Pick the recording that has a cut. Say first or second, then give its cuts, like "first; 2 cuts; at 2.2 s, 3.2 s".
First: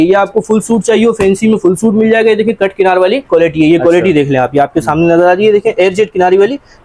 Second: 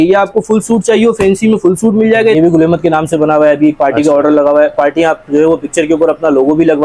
second; 1 cut; at 2.3 s